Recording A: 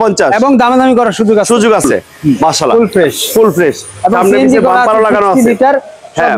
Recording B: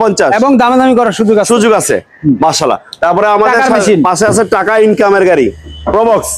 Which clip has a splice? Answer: A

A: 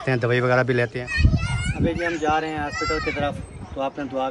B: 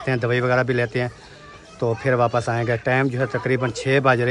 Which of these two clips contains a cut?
A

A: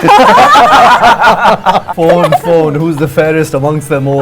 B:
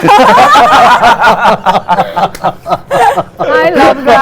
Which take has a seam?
A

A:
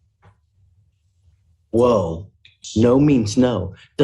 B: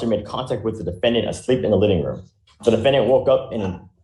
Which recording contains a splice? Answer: A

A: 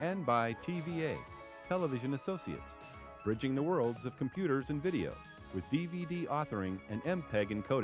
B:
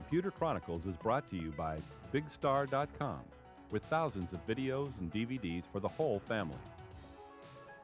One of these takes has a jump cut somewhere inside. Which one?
B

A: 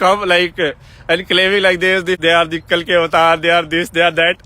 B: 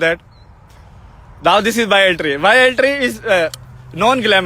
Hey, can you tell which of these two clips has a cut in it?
A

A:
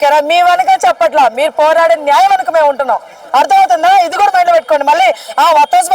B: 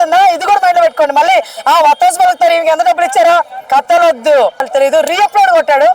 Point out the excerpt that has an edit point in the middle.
B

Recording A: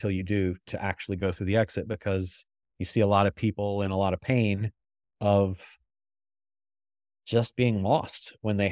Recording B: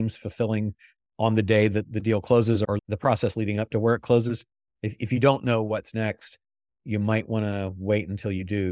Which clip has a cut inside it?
B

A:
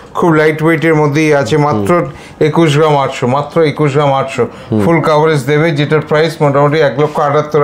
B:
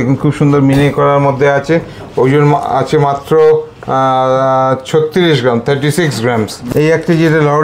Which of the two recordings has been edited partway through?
B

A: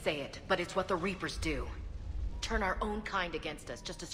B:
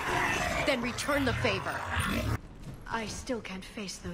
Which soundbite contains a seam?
B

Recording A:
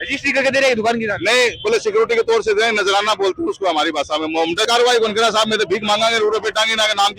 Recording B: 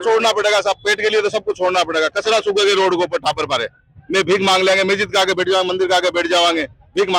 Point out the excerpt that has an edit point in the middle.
A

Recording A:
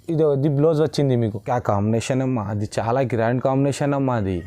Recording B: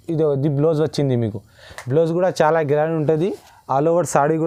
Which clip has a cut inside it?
A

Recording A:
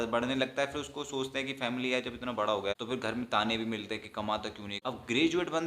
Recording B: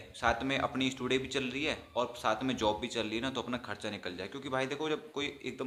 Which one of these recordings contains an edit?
A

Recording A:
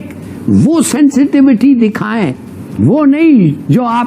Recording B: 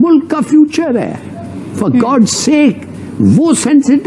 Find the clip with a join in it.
A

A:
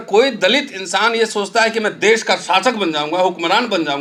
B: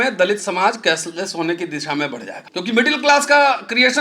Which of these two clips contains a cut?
B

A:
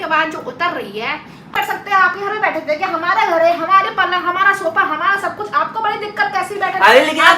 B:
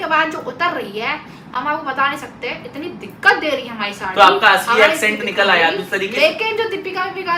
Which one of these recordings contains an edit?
A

